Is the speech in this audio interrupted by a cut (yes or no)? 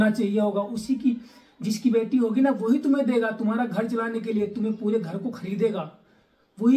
no